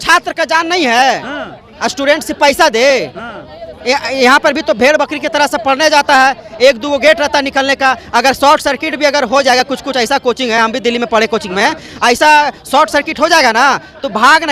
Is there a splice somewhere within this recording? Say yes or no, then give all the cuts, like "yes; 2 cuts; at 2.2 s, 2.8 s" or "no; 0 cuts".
no; 0 cuts